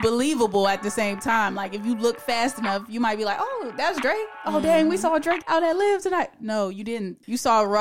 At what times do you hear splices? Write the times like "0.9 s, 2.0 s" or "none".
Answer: 5.4 s